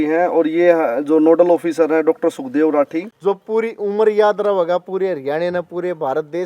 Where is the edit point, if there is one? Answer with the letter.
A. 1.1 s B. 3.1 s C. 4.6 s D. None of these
B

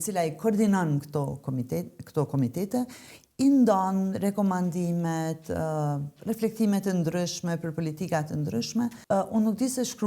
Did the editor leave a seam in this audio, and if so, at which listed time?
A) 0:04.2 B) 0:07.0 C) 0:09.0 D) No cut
C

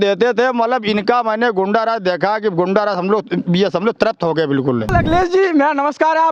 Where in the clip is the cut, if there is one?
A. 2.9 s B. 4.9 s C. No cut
B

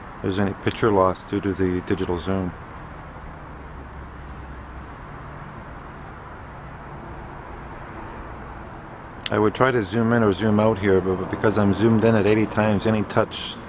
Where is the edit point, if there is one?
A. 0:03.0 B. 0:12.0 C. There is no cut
B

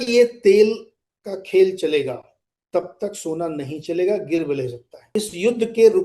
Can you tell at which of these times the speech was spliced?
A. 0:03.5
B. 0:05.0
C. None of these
B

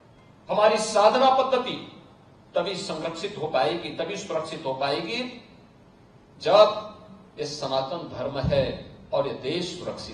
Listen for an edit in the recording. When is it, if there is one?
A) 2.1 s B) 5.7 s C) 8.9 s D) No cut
D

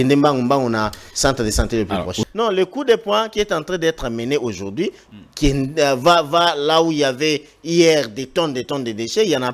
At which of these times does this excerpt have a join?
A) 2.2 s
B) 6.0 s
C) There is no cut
A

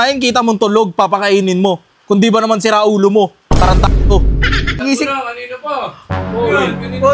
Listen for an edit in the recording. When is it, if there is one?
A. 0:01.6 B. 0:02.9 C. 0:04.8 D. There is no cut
C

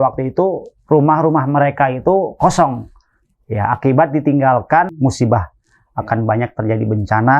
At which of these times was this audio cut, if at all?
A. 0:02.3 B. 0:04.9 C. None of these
B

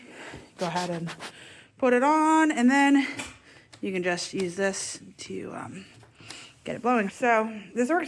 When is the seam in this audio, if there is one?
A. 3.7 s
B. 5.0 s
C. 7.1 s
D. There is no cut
C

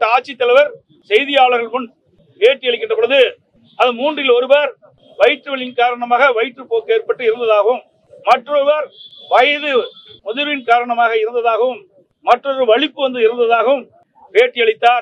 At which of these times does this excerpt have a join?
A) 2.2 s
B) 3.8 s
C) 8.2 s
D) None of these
D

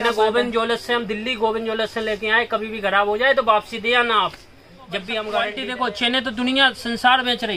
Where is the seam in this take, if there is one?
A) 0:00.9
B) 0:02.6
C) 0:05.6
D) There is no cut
C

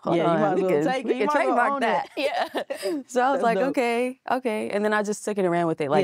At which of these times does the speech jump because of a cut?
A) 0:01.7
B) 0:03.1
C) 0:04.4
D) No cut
D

